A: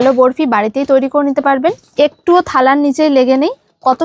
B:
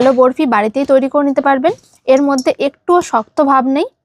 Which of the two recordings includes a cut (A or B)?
A